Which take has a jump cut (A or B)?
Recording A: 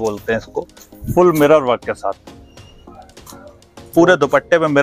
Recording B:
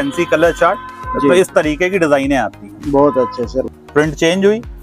B